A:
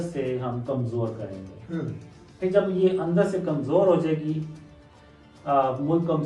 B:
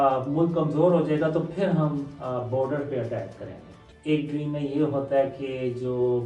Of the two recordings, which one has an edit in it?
B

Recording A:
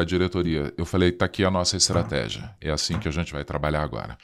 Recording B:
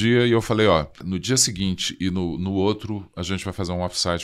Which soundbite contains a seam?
B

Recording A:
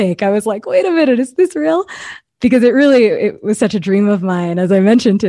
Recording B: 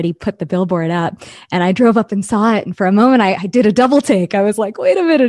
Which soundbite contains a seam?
A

